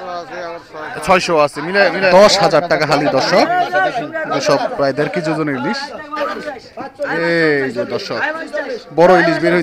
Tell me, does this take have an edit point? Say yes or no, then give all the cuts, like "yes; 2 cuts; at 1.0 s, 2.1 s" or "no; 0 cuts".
yes; 2 cuts; at 2.1 s, 6.2 s